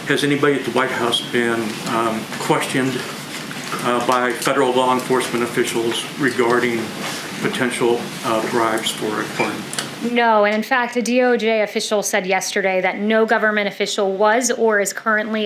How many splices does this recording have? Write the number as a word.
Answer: zero